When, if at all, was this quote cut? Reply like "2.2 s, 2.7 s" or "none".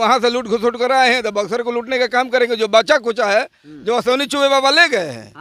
none